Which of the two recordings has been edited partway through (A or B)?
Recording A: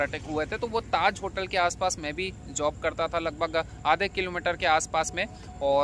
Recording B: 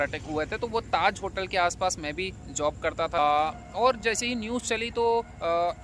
B